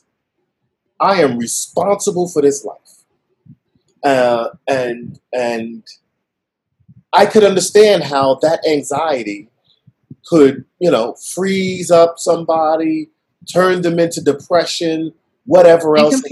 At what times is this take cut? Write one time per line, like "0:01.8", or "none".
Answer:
none